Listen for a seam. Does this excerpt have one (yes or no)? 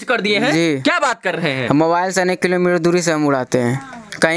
no